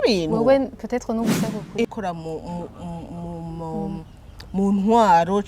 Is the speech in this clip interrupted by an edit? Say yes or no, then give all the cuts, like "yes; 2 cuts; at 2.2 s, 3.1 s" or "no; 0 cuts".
yes; 1 cut; at 1.8 s